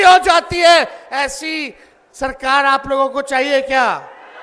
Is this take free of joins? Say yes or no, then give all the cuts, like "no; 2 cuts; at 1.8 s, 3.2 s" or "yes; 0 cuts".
yes; 0 cuts